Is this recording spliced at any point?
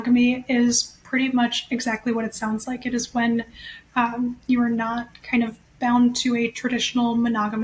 no; 0 cuts

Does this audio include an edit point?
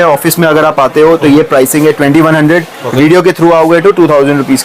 no; 0 cuts

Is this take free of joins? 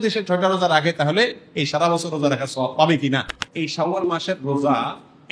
no; 1 cut; at 3.4 s

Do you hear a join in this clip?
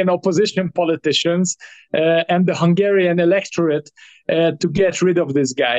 no; 0 cuts

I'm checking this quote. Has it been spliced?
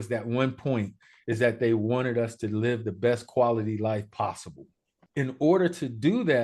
yes; 1 cut; at 5.0 s

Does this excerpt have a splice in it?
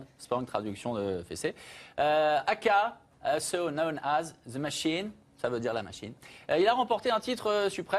no; 0 cuts

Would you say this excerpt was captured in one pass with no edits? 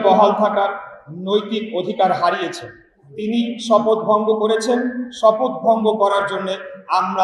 yes; 0 cuts

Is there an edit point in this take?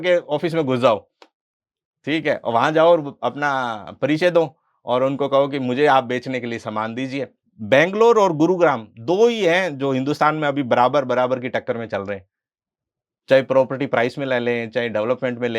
yes; 1 cut; at 7.3 s

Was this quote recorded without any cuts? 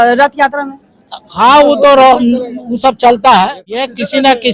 no; 1 cut; at 3.6 s

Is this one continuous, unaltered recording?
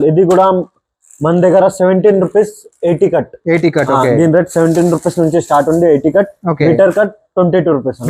yes; 0 cuts

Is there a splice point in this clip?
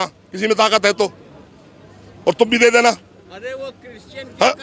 no; 0 cuts

